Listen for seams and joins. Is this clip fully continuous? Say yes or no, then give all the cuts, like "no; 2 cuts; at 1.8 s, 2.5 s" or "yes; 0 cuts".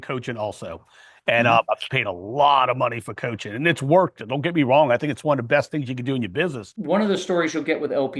no; 1 cut; at 6.7 s